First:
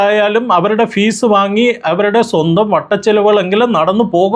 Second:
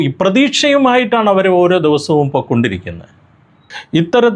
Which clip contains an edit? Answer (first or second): second